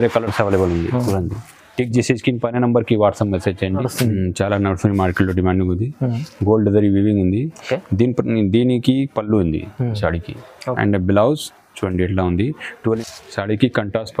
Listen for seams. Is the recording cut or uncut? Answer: cut